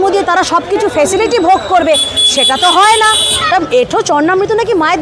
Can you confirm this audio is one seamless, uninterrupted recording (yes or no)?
no